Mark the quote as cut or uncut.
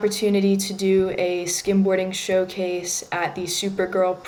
uncut